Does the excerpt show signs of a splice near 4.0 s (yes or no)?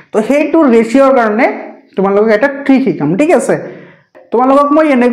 yes